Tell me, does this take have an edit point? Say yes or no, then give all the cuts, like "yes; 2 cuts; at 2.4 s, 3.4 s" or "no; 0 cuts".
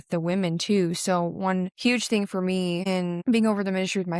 yes; 2 cuts; at 1.7 s, 2.8 s